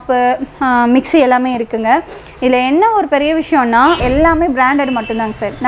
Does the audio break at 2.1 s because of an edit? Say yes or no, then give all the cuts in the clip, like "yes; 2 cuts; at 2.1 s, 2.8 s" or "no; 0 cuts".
no; 1 cut; at 4.0 s